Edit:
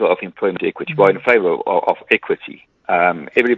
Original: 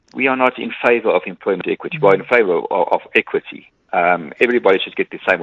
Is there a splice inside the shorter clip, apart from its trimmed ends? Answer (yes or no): no